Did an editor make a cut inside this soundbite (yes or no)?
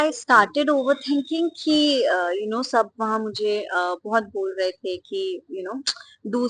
no